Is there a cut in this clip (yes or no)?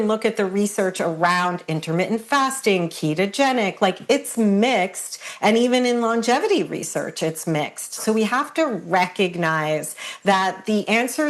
yes